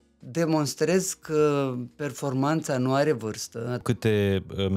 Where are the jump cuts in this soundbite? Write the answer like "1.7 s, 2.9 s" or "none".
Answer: 3.8 s